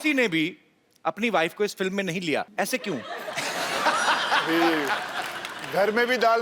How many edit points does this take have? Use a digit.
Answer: 1